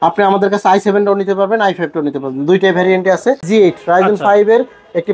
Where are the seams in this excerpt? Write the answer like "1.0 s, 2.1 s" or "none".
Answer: 3.4 s